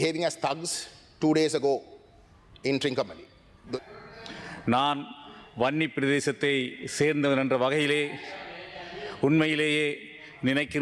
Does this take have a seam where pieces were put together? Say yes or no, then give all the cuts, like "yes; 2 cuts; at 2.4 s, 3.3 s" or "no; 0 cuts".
yes; 1 cut; at 3.6 s